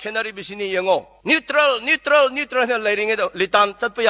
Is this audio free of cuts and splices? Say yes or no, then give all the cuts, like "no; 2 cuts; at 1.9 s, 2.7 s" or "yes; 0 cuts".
yes; 0 cuts